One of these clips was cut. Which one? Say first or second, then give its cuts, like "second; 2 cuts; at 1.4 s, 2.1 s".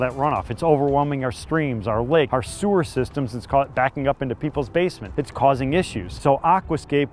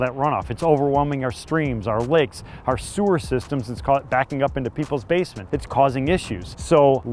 first; 2 cuts; at 2.3 s, 6.2 s